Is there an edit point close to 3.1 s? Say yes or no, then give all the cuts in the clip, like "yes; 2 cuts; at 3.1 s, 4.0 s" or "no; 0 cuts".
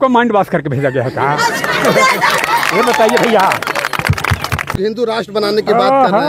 no; 1 cut; at 4.6 s